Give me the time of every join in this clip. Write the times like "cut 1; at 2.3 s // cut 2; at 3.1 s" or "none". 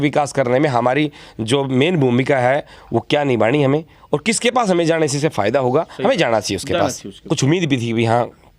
cut 1; at 7.2 s